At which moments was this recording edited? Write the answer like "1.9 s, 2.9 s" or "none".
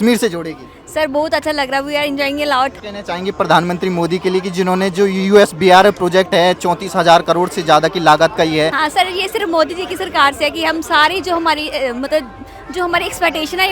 2.7 s, 8.8 s